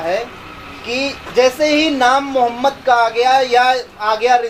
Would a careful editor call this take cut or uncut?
uncut